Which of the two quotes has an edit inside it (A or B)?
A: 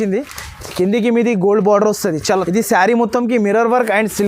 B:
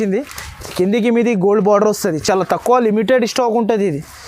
A